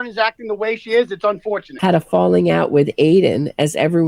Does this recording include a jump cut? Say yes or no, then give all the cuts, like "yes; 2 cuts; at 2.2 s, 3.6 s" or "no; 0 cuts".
yes; 1 cut; at 1.7 s